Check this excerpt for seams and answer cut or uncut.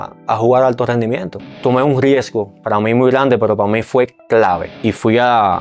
cut